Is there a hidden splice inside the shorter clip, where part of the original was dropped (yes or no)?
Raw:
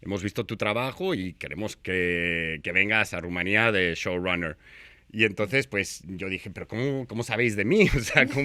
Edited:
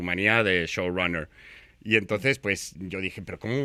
no